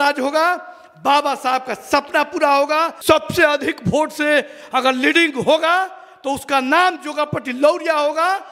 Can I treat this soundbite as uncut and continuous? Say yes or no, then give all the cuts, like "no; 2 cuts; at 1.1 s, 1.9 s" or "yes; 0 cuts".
no; 1 cut; at 2.9 s